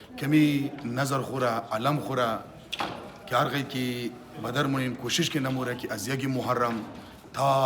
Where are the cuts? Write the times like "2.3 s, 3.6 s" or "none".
none